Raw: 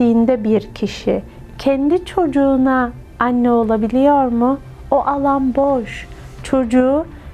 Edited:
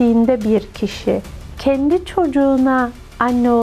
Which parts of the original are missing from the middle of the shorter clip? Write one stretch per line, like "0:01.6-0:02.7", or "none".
none

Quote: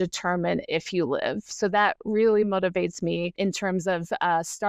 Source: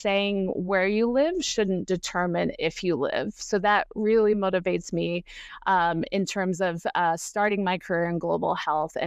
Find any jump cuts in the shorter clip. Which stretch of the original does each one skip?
0:05.3-0:06.1

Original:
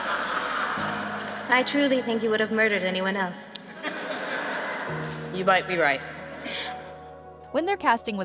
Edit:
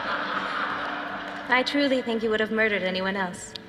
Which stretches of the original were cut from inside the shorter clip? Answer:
none

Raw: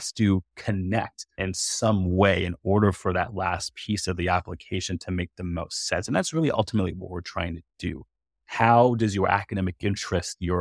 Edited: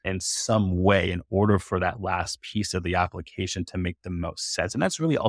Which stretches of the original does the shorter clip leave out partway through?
none

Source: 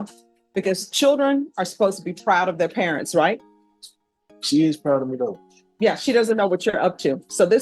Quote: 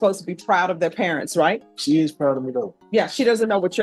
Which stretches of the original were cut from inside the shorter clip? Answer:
0:03.5-0:04.4
0:05.4-0:05.6

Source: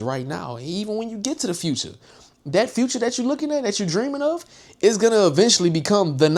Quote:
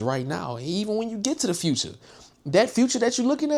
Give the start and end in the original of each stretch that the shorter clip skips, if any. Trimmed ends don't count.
none

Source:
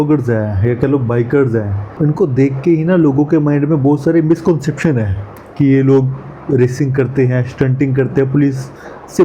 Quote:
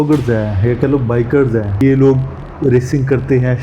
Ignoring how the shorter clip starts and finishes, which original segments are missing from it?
0:01.8-0:05.7

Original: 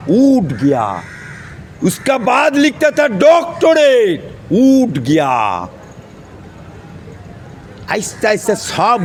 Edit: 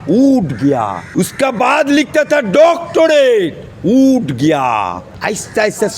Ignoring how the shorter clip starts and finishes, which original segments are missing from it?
0:01.0-0:01.7
0:05.7-0:07.7

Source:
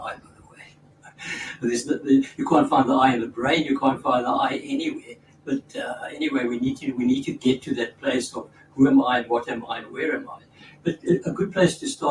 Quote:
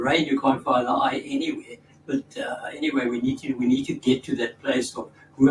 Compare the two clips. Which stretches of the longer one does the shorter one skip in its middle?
none

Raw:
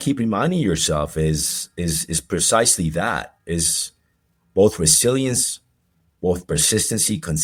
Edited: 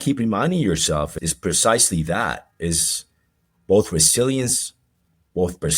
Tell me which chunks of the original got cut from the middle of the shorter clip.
0:01.1-0:02.0

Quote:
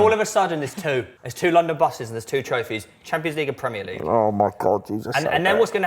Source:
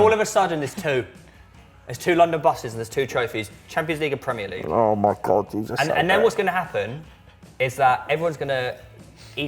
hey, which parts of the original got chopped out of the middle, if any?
0:01.2-0:01.8

